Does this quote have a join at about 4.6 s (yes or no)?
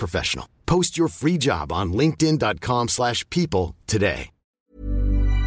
yes